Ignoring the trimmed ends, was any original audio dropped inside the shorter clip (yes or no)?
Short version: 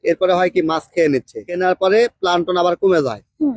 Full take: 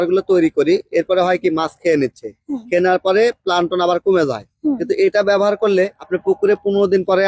yes